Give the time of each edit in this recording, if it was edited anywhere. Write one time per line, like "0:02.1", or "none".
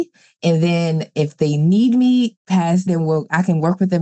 0:02.9